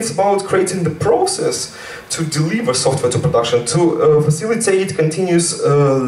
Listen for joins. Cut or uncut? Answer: uncut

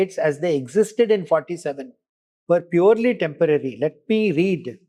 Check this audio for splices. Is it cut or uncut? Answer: uncut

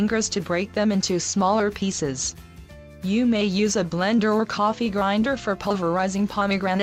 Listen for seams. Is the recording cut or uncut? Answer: uncut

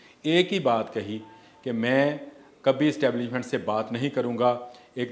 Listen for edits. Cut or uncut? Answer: uncut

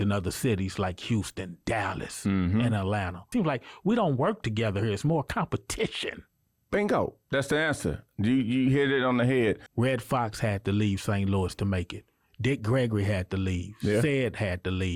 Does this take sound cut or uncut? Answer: cut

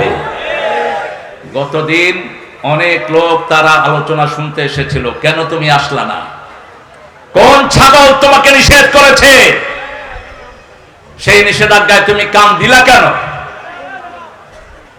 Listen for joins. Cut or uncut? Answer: uncut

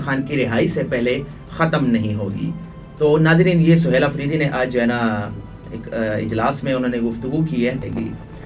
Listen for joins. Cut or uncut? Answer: uncut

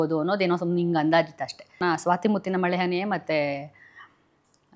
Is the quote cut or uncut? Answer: cut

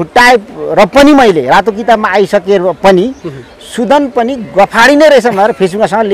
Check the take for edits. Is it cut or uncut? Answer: uncut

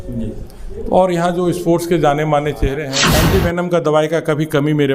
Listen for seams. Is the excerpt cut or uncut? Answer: cut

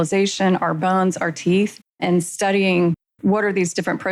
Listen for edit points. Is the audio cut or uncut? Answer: uncut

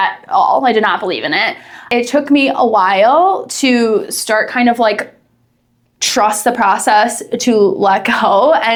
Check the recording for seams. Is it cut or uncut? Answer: uncut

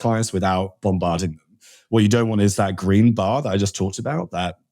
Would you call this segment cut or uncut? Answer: uncut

